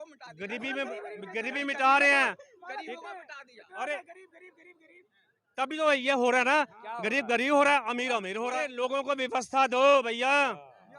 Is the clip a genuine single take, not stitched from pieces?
no; 1 cut; at 8.7 s

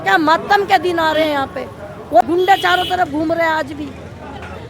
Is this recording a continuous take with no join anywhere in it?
no; 1 cut; at 2.2 s

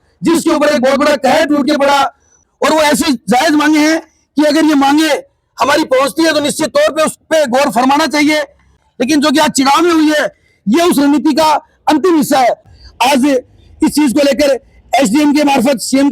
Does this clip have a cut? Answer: yes; 3 cuts; at 2.3 s, 8.8 s, 12.7 s

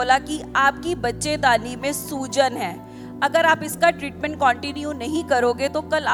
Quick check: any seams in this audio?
no; 0 cuts

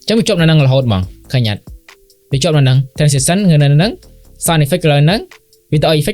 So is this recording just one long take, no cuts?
yes; 0 cuts

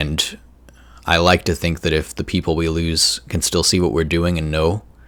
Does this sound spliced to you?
no; 0 cuts

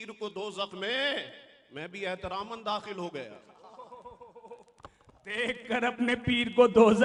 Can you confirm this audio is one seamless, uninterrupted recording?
yes; 0 cuts

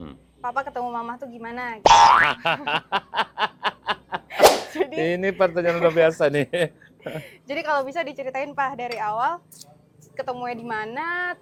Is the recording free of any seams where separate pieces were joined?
yes; 0 cuts

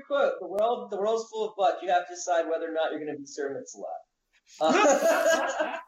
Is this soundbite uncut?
yes; 0 cuts

